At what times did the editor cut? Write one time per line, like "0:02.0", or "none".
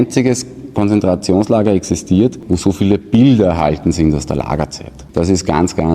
0:02.5
0:04.9